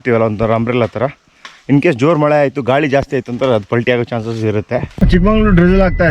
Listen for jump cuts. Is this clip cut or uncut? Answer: cut